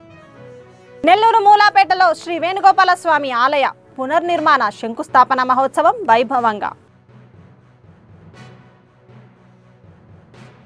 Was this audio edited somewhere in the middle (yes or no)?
no